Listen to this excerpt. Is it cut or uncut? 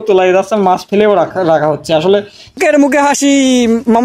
cut